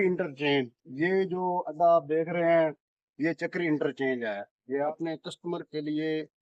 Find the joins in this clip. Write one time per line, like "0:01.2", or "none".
0:04.8